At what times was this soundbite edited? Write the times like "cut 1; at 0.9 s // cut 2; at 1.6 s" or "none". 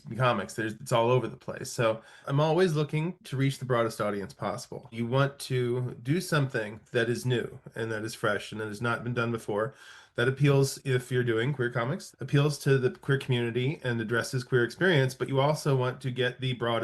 cut 1; at 2.2 s // cut 2; at 4.9 s // cut 3; at 12.0 s